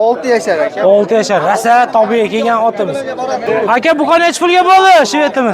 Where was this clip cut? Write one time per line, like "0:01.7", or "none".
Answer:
0:03.4